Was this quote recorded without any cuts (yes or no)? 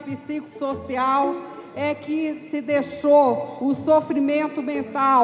yes